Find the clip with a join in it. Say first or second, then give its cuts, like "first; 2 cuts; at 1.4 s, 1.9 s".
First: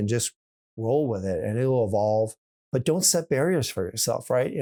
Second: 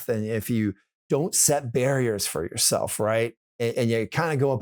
second; 2 cuts; at 0.9 s, 3.4 s